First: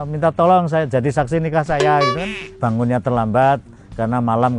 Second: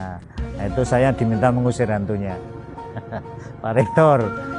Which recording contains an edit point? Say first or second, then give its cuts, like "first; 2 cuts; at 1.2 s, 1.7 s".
first; 1 cut; at 2.5 s